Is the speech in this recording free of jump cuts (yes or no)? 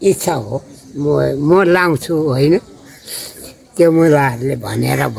yes